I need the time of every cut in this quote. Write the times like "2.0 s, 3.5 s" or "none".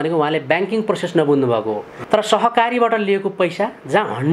1.9 s